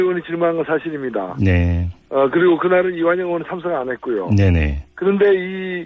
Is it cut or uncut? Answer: uncut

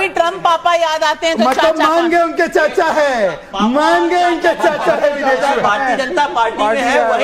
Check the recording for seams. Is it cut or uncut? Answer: uncut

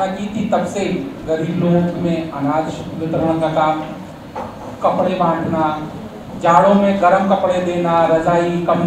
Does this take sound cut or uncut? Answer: uncut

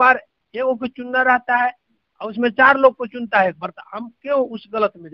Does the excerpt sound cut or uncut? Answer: uncut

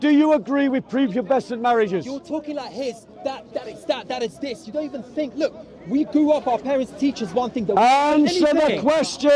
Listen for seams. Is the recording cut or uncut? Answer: uncut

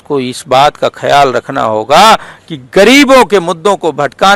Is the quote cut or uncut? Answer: uncut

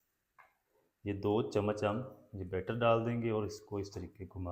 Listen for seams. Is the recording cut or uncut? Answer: uncut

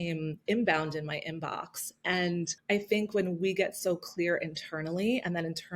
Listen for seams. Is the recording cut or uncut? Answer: cut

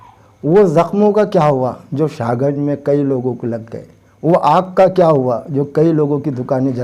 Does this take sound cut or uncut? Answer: uncut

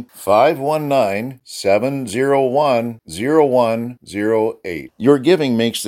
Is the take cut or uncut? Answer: uncut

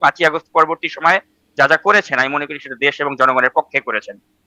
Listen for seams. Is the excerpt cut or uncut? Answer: uncut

